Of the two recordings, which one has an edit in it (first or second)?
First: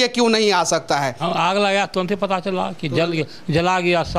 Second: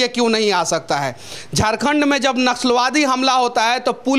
first